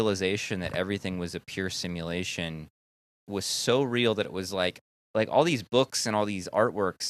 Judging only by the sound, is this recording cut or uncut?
cut